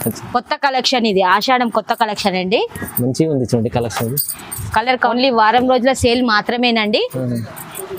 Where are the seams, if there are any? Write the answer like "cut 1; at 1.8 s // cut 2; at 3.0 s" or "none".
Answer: cut 1; at 5.1 s

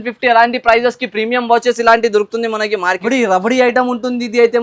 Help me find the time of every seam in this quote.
cut 1; at 3.0 s

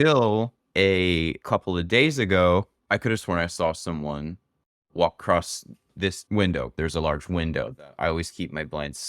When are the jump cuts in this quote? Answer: cut 1; at 6.8 s

